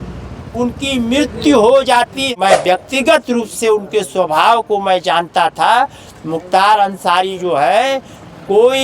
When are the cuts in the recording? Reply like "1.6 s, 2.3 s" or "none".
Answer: 2.3 s